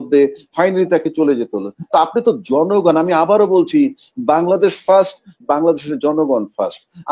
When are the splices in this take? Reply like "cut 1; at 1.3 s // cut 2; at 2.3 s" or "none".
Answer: none